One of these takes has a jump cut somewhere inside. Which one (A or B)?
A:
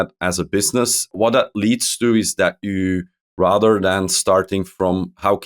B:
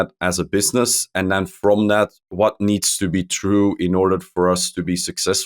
A